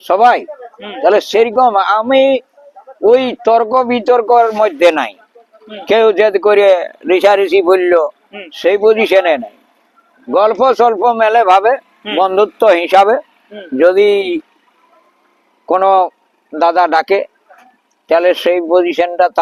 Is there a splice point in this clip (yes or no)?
no